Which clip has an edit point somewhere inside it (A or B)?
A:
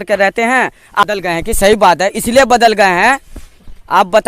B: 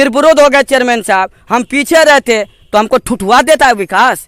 A